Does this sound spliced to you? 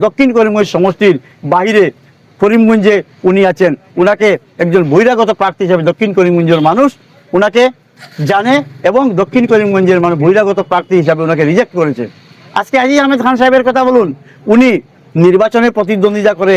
no; 0 cuts

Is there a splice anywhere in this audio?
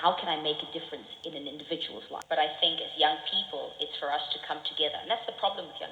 yes; 1 cut; at 2.2 s

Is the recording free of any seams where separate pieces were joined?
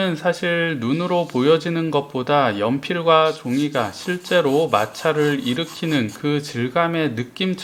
yes; 0 cuts

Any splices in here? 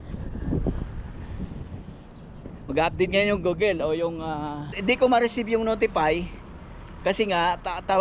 yes; 1 cut; at 4.8 s

